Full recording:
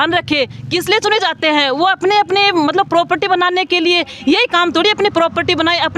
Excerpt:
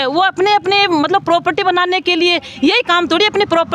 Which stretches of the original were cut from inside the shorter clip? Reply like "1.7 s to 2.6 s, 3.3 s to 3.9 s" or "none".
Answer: none